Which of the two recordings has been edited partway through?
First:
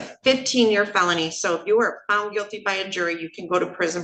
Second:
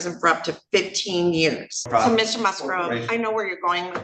second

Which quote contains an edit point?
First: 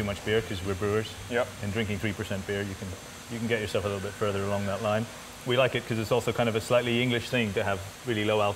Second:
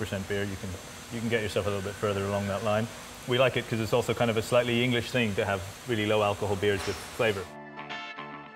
second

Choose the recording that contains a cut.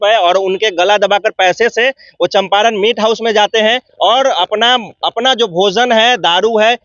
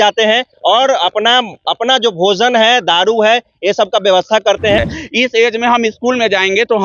second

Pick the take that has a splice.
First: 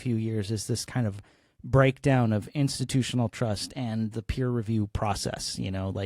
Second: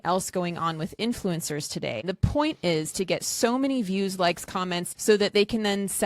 second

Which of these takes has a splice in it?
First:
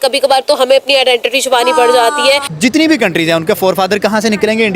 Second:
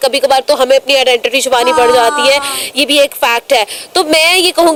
first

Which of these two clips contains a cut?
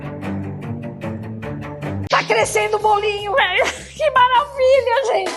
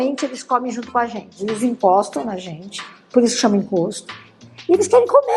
first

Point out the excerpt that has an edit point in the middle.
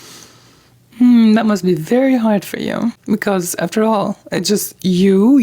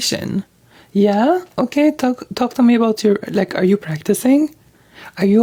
first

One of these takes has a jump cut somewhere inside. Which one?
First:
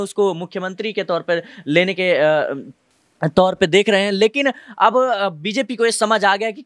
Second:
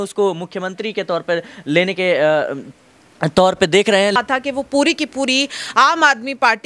second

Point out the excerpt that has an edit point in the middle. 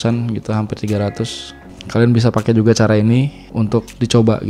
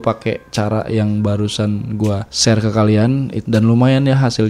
second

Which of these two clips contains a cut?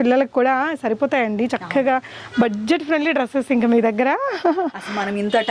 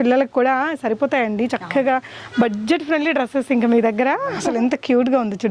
second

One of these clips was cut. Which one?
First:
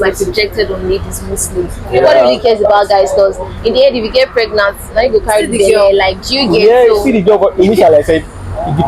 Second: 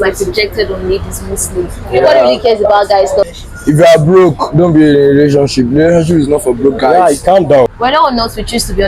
second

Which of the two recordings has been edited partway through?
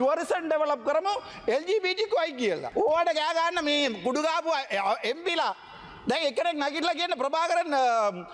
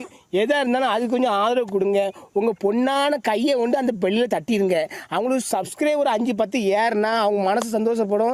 first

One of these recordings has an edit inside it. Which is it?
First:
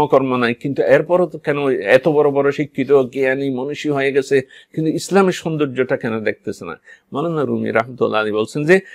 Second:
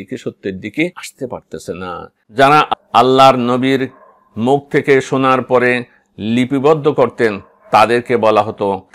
second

